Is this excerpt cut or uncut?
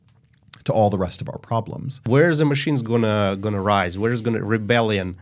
cut